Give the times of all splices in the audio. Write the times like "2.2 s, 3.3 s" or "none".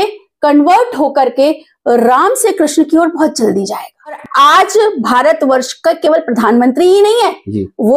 4.2 s

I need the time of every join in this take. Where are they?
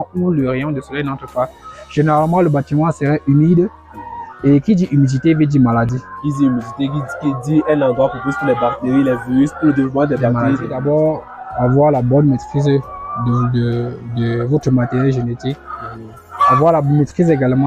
10.8 s

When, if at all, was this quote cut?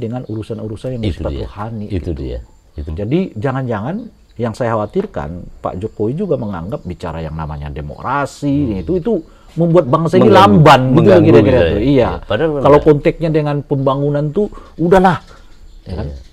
2.9 s

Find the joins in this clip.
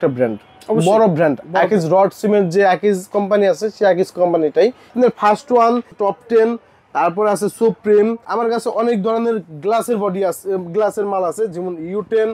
4.9 s, 5.9 s, 8.2 s

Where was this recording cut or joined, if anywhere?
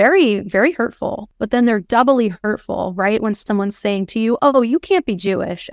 1.2 s

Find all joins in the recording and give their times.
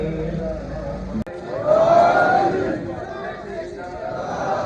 1.3 s

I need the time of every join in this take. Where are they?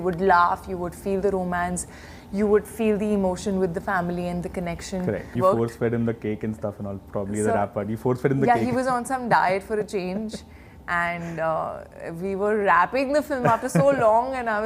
5.3 s

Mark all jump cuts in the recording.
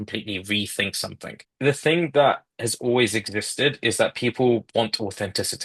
1.4 s

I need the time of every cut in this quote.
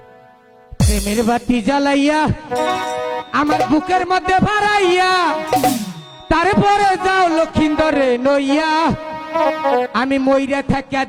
none

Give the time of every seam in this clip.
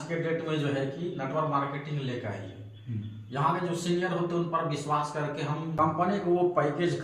5.7 s

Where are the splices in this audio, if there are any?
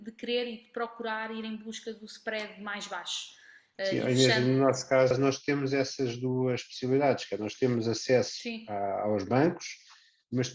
5.1 s

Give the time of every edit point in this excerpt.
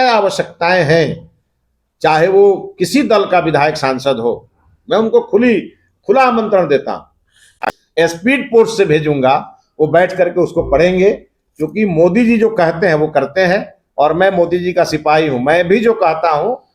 none

